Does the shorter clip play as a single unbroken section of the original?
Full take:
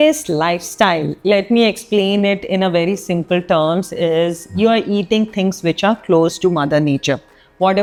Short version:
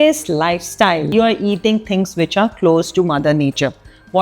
no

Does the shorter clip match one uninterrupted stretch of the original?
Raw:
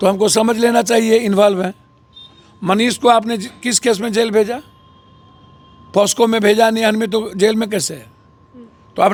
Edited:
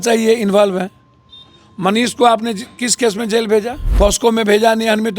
no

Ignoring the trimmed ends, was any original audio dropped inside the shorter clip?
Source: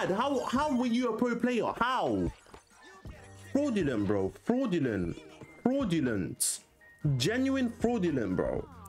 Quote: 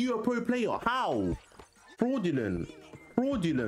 yes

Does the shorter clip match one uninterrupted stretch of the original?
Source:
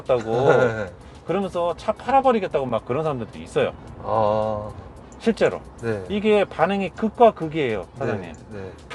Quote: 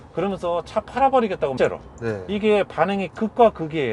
no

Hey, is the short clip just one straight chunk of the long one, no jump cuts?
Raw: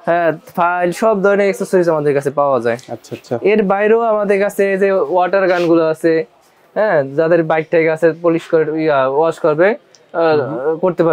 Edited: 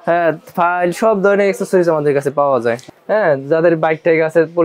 no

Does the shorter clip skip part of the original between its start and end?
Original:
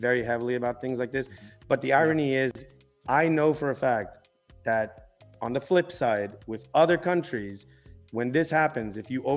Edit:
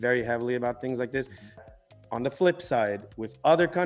yes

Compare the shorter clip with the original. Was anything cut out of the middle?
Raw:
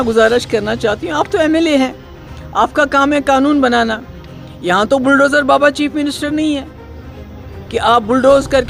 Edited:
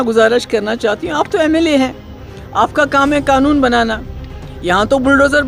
no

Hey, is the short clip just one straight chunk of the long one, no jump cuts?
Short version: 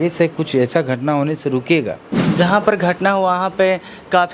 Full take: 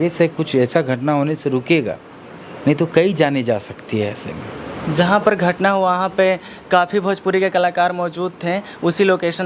no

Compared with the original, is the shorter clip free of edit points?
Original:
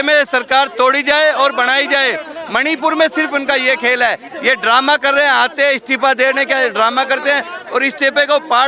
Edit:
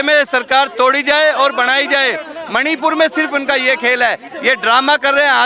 yes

